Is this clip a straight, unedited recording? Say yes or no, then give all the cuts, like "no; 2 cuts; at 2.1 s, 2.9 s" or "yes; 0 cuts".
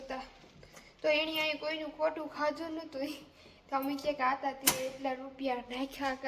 yes; 0 cuts